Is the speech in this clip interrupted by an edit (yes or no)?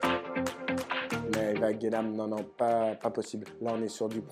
no